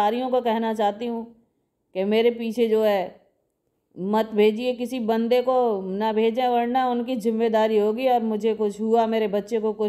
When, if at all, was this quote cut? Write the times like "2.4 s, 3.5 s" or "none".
none